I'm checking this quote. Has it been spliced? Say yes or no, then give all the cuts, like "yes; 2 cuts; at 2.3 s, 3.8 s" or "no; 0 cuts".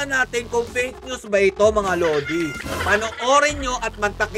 yes; 1 cut; at 2.6 s